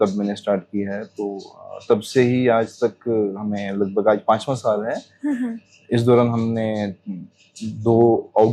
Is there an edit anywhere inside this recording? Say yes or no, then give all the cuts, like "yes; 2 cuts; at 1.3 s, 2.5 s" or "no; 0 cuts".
no; 0 cuts